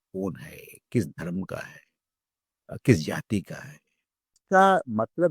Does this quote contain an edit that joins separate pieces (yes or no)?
yes